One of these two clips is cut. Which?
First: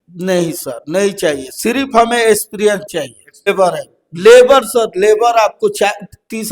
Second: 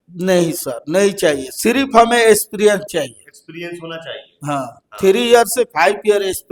first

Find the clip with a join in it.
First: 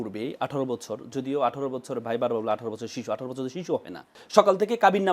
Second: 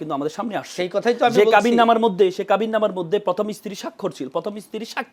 first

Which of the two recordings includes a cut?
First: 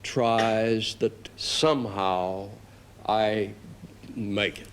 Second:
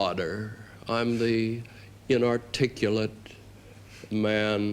first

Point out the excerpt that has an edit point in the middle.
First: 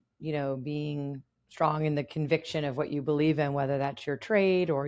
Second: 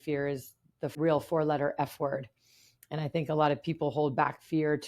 second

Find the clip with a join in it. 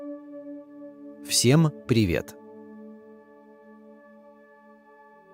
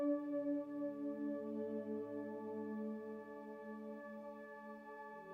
first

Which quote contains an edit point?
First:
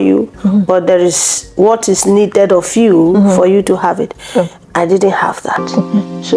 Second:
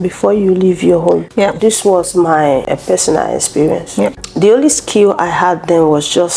second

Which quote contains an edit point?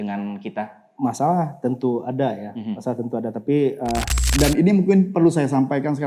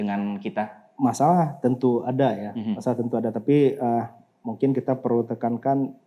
first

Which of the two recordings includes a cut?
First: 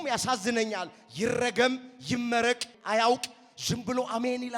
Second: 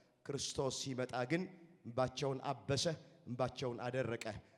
first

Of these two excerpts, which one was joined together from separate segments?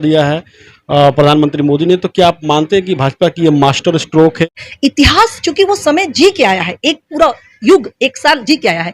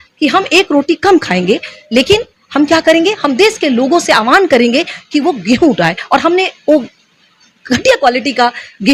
first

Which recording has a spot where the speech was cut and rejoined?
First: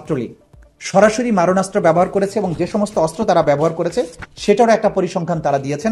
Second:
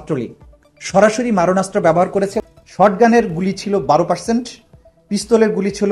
second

